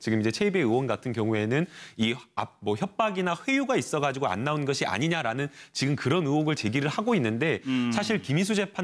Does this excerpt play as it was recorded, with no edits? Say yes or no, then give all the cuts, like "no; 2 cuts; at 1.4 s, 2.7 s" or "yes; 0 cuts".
no; 1 cut; at 3.0 s